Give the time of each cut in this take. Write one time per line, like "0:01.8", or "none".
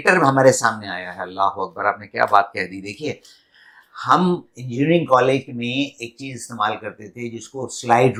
none